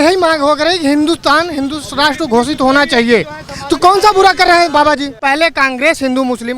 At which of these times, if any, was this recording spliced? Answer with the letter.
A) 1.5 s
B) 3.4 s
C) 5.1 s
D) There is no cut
C